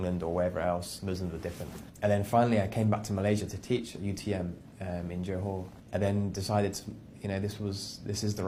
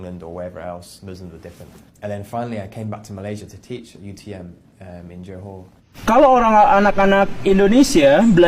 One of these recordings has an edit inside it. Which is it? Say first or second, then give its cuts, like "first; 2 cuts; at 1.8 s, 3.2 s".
second; 1 cut; at 6.0 s